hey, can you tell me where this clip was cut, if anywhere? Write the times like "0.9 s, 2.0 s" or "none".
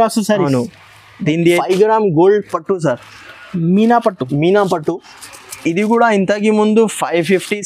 1.6 s